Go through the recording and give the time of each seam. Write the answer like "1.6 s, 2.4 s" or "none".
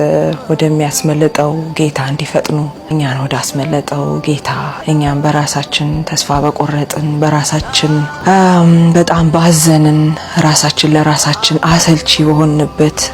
2.8 s, 4.7 s, 8.1 s